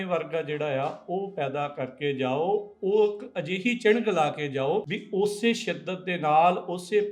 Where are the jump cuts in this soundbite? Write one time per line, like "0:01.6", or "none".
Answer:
0:05.0